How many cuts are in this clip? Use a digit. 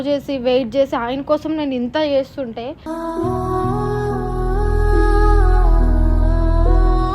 1